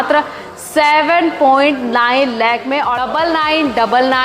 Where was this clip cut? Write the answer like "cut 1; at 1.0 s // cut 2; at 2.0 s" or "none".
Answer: cut 1; at 3.0 s